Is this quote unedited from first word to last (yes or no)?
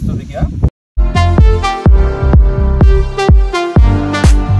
no